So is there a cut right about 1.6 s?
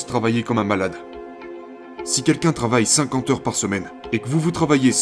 yes; 2 cuts; at 1.6 s, 3.9 s

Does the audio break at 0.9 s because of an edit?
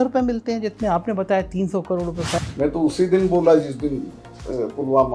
no; 1 cut; at 2.4 s

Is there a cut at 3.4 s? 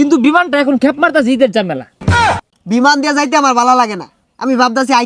no; 1 cut; at 2.1 s

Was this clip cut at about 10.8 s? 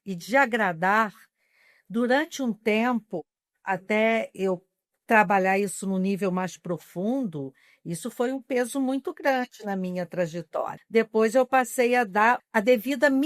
yes; 2 cuts; at 10.8 s, 12.4 s

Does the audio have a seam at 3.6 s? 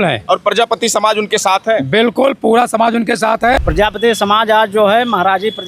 yes; 1 cut; at 3.6 s

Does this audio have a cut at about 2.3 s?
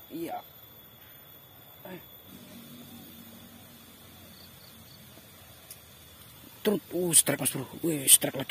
yes; 1 cut; at 2.3 s

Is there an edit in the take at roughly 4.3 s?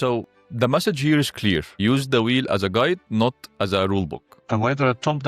yes; 1 cut; at 4.3 s

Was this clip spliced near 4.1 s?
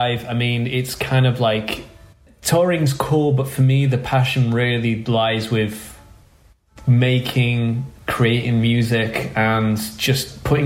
no; 1 cut; at 2.3 s

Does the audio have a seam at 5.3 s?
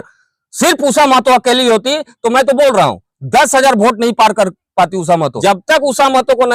yes; 1 cut; at 5.3 s

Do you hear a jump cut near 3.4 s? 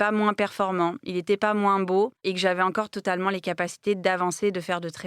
no; 1 cut; at 2.2 s

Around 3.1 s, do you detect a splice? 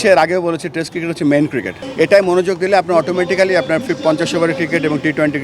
no; 1 cut; at 1.8 s

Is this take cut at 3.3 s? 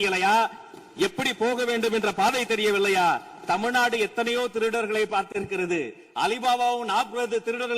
no; 0 cuts

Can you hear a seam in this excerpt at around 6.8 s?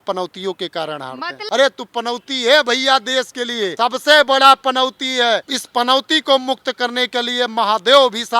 no; 3 cuts; at 1.3 s, 3.7 s, 5.6 s

